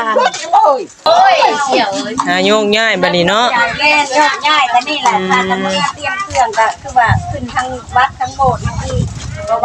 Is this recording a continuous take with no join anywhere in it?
no; 1 cut; at 1.1 s

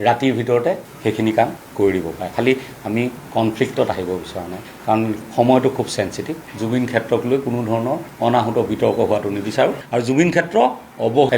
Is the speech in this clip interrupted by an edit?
yes; 1 cut; at 6.5 s

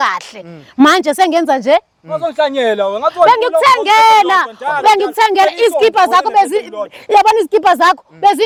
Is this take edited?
no; 0 cuts

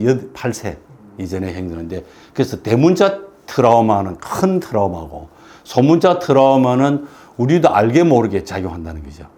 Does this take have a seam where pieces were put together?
no; 0 cuts

